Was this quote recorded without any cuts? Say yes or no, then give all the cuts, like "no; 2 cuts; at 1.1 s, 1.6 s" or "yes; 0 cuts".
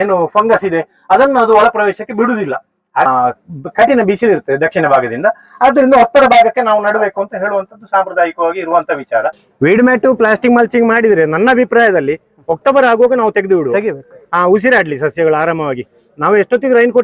no; 2 cuts; at 3.1 s, 9.4 s